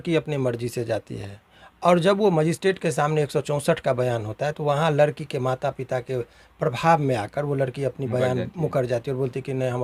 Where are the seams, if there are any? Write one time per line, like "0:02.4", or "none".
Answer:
none